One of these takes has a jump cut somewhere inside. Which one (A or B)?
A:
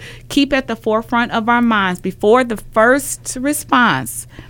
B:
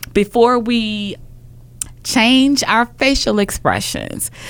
B